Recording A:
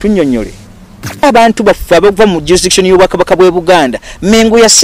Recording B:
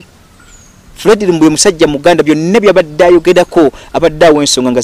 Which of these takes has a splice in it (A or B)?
A